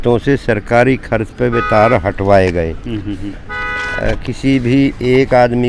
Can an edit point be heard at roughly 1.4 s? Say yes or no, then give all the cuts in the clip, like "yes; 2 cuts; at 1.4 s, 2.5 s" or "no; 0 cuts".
no; 0 cuts